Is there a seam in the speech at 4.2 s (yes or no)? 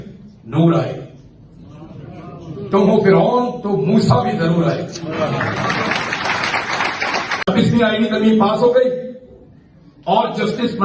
no